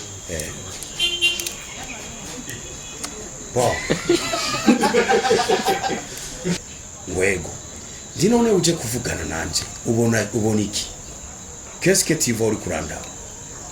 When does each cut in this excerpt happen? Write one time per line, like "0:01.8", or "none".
0:06.6